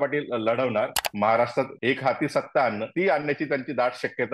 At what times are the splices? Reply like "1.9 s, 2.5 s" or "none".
1.0 s, 1.7 s, 2.8 s